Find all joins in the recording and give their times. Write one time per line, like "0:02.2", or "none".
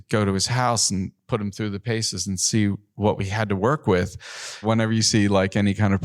0:02.9
0:04.6